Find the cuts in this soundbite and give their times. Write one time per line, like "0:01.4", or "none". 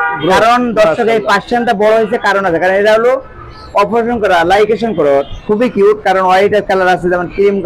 0:05.3